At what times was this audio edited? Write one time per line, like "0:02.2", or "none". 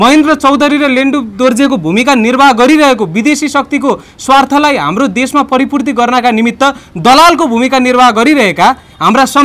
none